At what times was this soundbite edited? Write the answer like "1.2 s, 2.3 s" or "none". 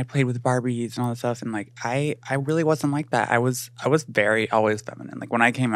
none